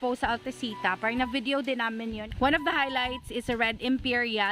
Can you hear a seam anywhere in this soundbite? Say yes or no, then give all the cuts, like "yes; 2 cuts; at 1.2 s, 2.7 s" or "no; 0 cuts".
yes; 1 cut; at 2.3 s